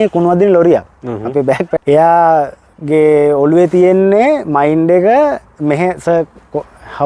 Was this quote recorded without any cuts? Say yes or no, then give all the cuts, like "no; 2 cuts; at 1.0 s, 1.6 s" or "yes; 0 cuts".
no; 1 cut; at 1.7 s